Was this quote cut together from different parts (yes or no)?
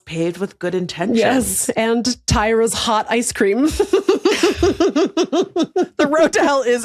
no